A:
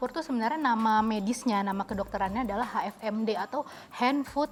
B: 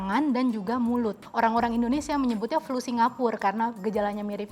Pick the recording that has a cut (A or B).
B